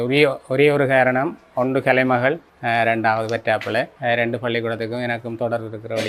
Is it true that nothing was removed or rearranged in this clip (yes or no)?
no